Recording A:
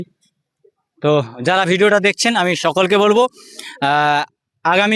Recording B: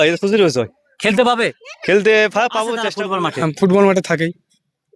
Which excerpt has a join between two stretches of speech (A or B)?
B